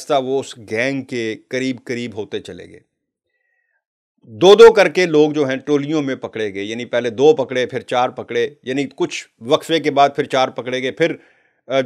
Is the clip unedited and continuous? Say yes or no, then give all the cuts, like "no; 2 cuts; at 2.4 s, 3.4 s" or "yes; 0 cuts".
yes; 0 cuts